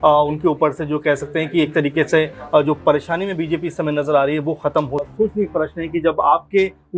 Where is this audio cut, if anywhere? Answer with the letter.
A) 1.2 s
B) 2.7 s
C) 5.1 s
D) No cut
C